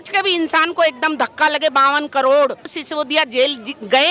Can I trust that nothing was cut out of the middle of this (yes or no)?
no